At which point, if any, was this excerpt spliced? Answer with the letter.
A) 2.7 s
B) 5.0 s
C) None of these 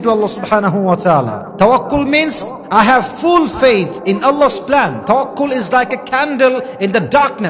B